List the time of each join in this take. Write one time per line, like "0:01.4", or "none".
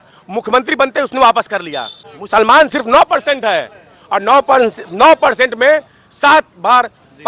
0:02.1